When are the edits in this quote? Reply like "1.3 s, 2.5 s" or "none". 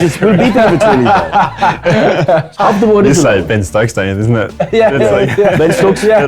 2.5 s